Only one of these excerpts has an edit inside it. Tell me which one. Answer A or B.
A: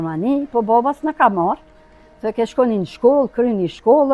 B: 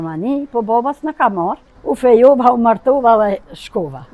B